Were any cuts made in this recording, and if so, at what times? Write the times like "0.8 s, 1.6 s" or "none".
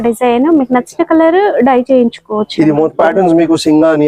2.9 s